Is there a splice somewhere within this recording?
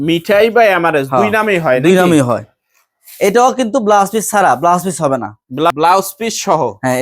yes; 1 cut; at 5.7 s

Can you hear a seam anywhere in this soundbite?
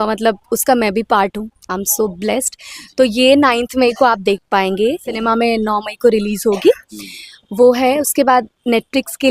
yes; 1 cut; at 5.2 s

